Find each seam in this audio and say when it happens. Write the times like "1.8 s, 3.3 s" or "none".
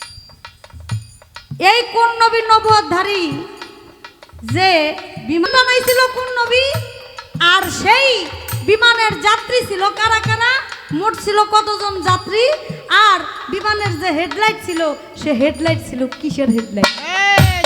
5.5 s

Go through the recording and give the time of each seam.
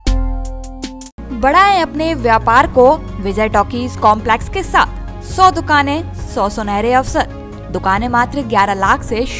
none

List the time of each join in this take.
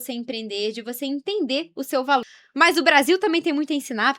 2.2 s

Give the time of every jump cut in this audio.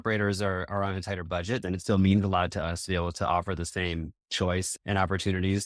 1.6 s, 4.7 s

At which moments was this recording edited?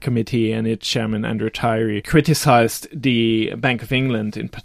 2.0 s

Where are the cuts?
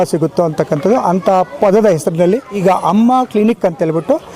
2.6 s

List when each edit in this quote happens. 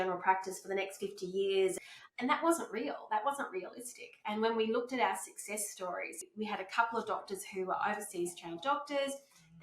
1.8 s, 6.2 s

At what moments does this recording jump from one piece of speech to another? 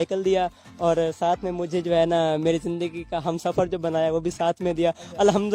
none

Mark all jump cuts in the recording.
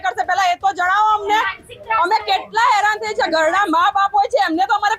none

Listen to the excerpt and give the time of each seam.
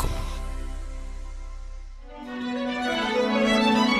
2.2 s

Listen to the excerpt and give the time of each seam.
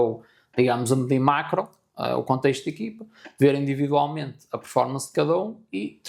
none

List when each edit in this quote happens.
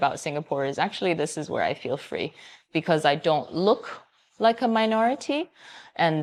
none

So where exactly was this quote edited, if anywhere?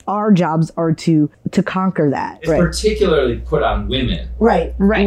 1.4 s, 2.4 s

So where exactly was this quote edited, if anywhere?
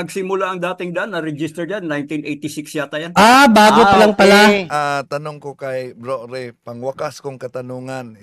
4.7 s

